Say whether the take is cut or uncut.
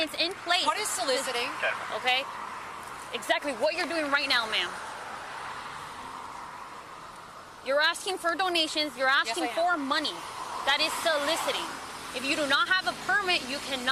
uncut